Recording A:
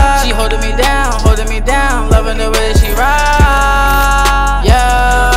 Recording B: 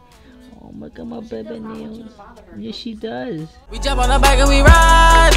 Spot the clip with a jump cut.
B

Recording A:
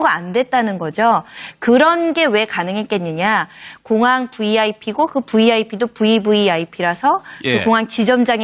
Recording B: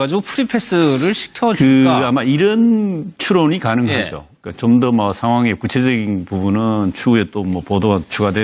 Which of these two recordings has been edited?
A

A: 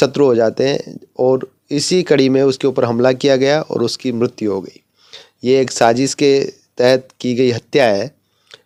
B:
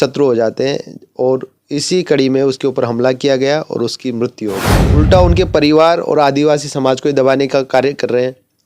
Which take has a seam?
B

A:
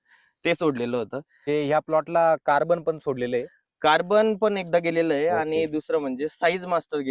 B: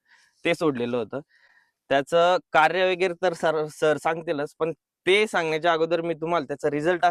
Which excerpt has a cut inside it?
A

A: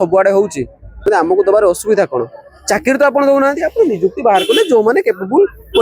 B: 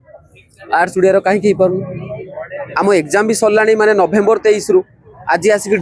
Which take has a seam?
A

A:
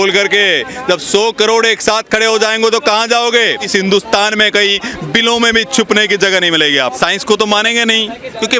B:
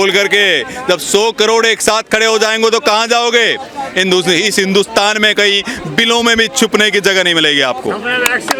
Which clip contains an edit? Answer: A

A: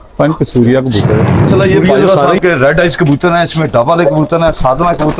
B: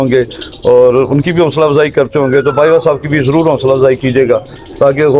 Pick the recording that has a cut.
A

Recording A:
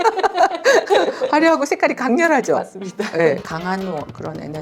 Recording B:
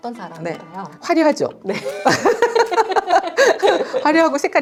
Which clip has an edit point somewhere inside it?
A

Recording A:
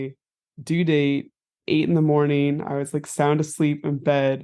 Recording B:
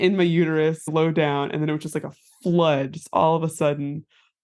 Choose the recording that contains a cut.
A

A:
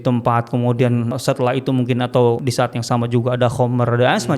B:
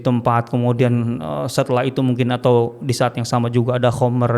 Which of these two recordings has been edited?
A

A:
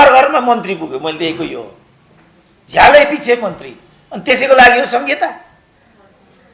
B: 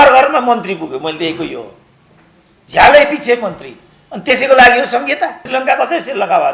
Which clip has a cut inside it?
B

